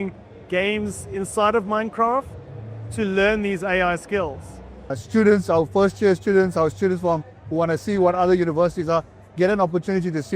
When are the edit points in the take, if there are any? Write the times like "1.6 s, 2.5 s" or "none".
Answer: 5.0 s